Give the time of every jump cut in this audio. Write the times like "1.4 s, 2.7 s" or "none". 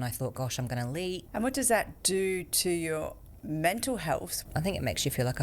1.3 s, 2.0 s, 4.3 s